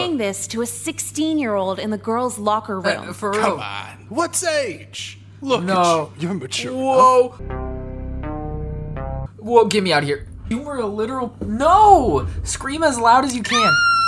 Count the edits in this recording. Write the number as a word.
two